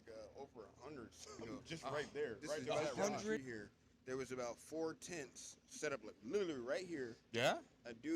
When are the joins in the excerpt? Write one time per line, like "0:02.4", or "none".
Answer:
0:03.4